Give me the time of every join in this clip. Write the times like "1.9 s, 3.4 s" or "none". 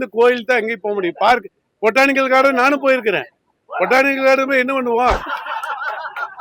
5.2 s

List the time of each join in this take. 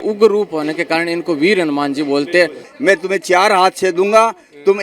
2.7 s

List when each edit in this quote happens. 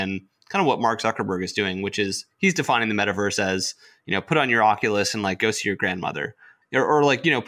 6.6 s

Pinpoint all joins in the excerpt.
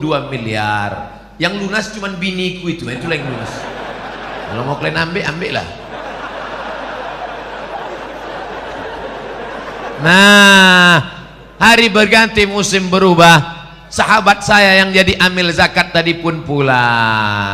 7.8 s

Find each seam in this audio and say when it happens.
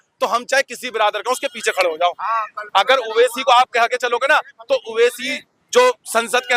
none

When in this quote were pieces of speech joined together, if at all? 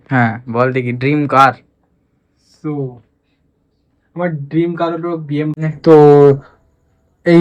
5.5 s

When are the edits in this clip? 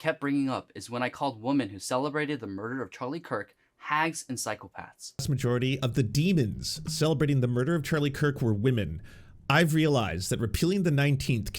5.2 s

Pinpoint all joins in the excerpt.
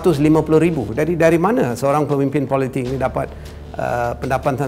0.9 s

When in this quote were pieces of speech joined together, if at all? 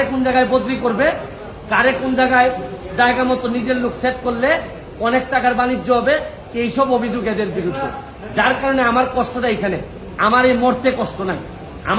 none

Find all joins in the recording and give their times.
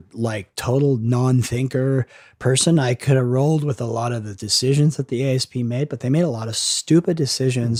none

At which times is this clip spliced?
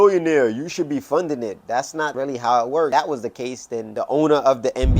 2.9 s

